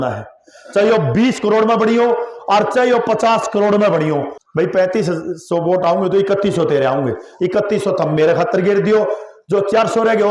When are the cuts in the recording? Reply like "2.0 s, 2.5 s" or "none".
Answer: 4.4 s